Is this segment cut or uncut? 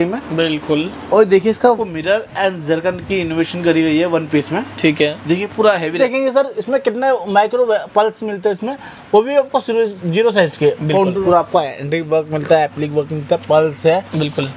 cut